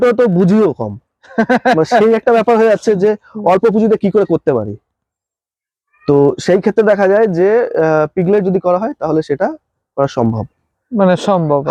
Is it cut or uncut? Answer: uncut